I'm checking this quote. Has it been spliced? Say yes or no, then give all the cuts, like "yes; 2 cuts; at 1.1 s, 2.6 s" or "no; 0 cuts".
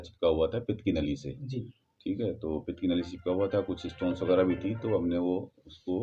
no; 0 cuts